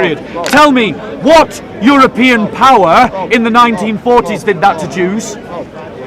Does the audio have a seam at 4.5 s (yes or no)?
no